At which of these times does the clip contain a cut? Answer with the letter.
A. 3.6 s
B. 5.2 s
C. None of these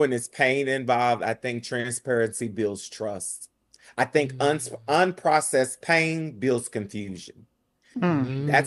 C